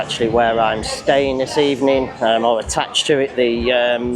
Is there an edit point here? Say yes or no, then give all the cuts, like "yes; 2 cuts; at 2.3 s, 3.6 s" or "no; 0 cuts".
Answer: no; 0 cuts